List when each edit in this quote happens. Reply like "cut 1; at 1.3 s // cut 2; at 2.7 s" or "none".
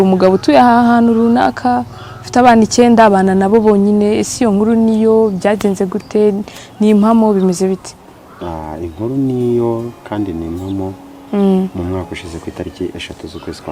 none